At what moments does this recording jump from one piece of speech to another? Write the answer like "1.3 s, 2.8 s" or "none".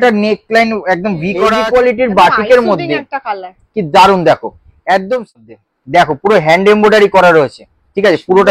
1.5 s, 5.3 s

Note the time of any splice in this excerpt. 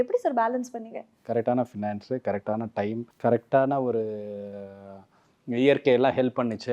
1.1 s, 3.1 s

